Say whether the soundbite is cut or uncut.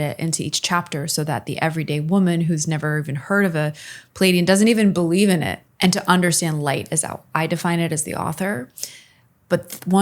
cut